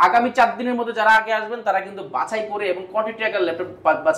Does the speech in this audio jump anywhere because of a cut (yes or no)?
no